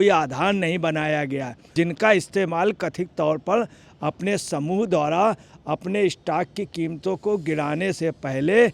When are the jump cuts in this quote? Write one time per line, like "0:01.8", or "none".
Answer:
0:01.6